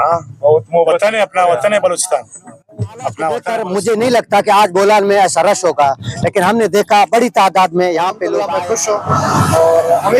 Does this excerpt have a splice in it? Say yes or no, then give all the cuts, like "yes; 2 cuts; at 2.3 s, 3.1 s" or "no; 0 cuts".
yes; 2 cuts; at 3.5 s, 8.4 s